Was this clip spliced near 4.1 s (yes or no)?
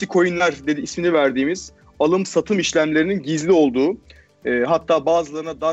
no